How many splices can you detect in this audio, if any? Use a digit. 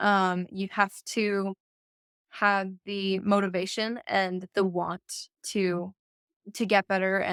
0